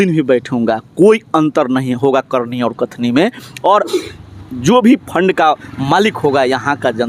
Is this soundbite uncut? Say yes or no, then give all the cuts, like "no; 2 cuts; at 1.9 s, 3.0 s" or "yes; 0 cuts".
yes; 0 cuts